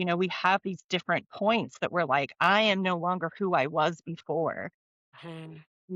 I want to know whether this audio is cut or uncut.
uncut